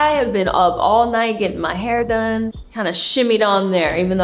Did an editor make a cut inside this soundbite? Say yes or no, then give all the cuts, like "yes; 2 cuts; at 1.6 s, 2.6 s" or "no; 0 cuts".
yes; 1 cut; at 2.6 s